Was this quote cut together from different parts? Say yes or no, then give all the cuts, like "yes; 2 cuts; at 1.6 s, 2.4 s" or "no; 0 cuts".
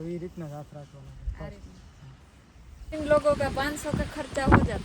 yes; 1 cut; at 2.8 s